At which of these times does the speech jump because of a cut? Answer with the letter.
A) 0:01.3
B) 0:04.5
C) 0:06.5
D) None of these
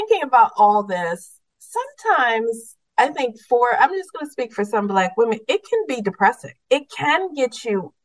C